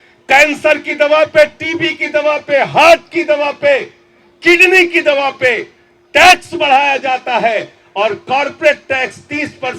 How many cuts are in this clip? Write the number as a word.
zero